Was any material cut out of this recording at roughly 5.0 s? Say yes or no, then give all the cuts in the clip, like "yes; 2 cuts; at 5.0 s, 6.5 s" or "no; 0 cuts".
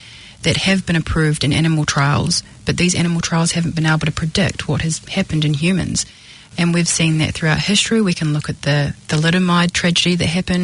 yes; 1 cut; at 5.0 s